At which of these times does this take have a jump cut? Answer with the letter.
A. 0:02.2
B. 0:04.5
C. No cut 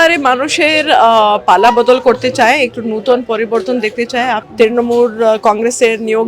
B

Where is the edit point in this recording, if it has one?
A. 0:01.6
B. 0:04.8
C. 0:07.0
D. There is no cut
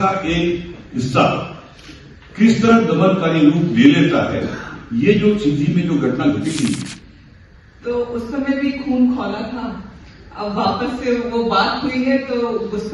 C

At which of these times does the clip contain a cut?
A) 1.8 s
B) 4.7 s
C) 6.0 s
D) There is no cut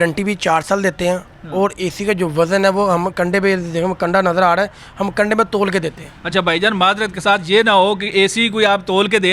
D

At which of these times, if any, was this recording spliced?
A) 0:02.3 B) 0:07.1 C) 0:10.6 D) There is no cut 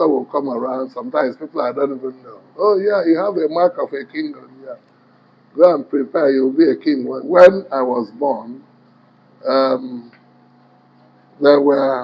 B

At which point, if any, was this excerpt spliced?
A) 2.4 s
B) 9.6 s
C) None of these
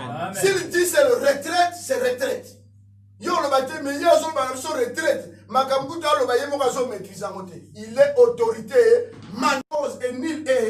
B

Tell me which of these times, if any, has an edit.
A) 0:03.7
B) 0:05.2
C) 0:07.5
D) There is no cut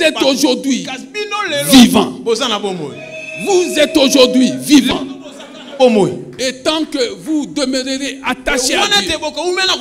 D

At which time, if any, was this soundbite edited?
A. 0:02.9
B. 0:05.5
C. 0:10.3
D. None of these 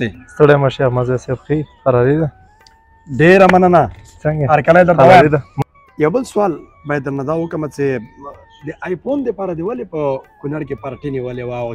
B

